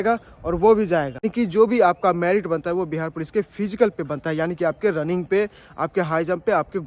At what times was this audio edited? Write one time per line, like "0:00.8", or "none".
0:01.3

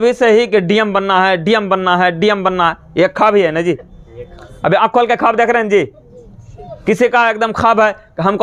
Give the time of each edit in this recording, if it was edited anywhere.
none

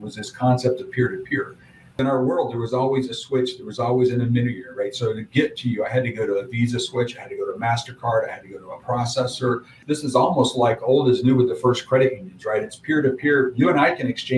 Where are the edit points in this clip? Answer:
0:02.0
0:09.8

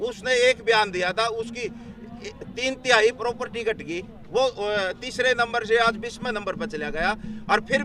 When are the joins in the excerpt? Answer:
none

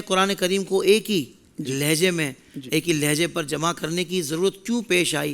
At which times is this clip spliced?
none

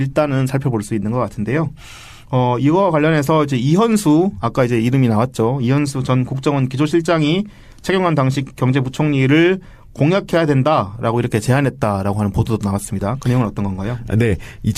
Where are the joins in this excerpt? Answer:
0:12.8

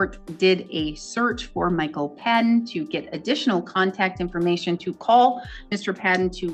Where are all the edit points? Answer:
none

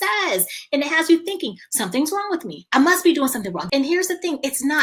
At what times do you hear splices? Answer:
0:02.6
0:03.6

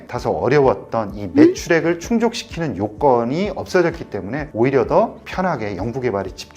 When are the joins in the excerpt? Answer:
0:02.9

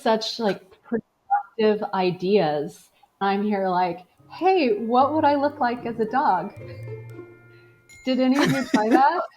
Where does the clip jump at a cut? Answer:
0:03.2

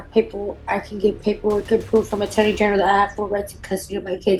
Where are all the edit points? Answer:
none

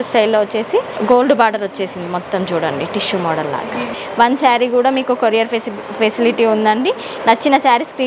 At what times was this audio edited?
0:00.9
0:04.0

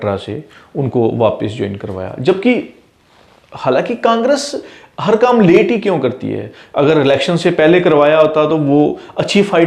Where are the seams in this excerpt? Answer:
none

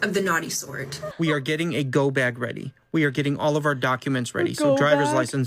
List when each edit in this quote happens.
0:01.0

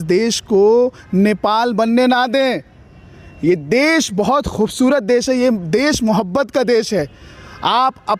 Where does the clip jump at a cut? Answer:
none

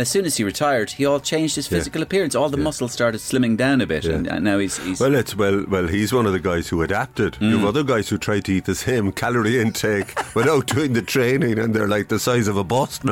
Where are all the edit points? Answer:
none

